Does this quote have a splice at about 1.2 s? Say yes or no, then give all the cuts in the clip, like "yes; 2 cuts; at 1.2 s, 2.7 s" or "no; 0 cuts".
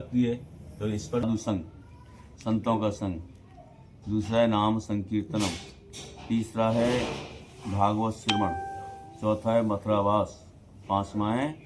yes; 1 cut; at 1.2 s